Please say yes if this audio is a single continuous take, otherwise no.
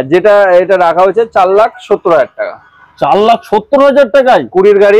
yes